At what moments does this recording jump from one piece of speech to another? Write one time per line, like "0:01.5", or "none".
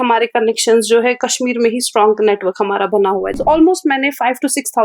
0:03.4